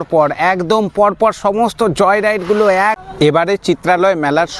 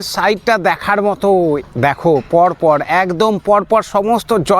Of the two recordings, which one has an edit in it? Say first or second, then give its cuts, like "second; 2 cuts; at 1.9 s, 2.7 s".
first; 1 cut; at 3.0 s